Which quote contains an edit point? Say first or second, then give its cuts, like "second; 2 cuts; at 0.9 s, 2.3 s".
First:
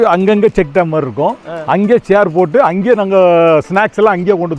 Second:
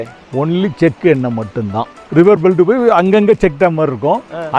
second; 1 cut; at 1.9 s